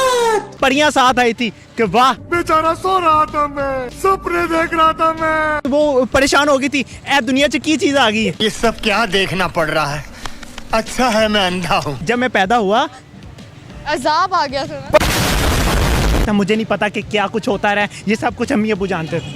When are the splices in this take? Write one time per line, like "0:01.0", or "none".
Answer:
0:05.7
0:16.2